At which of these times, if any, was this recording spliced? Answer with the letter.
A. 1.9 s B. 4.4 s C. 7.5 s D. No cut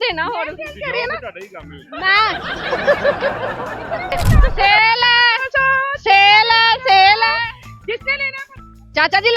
B